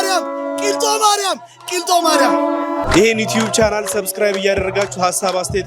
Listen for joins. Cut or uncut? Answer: cut